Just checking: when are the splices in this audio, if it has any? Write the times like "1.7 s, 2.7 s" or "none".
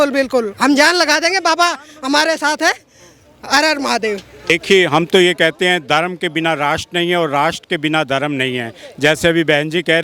4.5 s